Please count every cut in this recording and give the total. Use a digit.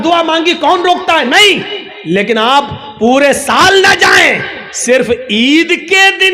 0